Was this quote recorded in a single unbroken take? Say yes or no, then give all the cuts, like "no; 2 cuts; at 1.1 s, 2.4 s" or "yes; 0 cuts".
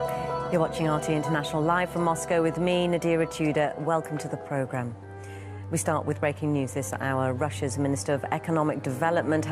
yes; 0 cuts